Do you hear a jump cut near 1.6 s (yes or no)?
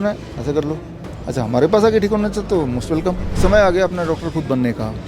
no